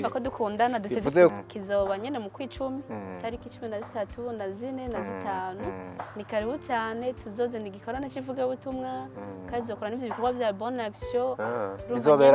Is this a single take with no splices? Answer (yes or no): no